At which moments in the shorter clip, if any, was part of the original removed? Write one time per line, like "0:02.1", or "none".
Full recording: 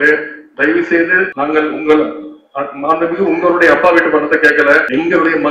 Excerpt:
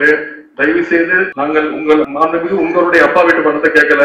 0:02.1